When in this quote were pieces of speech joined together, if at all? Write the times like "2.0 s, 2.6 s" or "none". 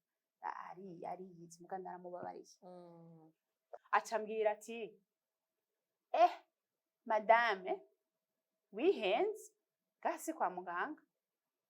3.8 s